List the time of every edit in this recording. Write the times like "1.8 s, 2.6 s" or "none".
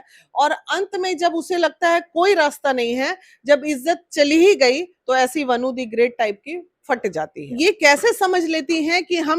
7.4 s